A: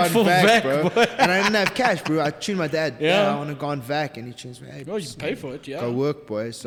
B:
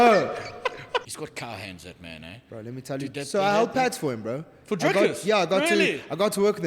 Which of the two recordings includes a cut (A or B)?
B